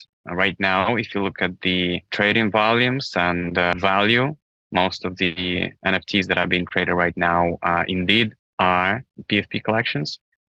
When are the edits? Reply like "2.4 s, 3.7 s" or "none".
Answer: none